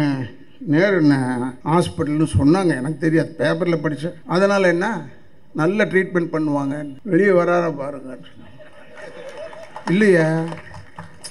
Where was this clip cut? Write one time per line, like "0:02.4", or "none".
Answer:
0:01.5
0:04.1
0:06.9